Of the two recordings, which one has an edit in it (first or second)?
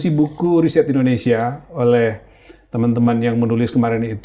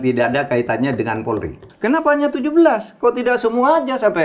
second